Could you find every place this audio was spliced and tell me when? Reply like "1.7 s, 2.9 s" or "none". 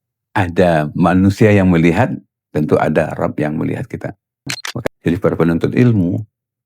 4.6 s